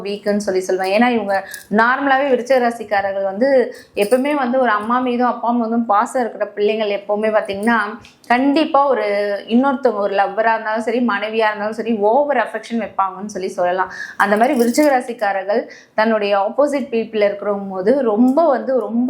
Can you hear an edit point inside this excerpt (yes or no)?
no